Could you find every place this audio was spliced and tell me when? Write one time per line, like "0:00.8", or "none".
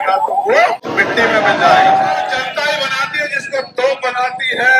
0:00.9
0:02.2